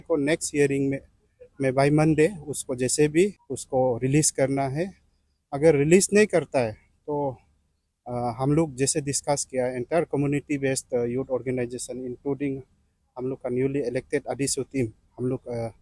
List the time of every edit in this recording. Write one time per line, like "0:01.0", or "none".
none